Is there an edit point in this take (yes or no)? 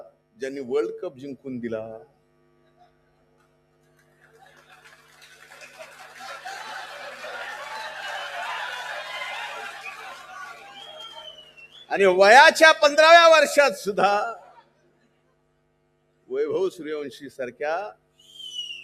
no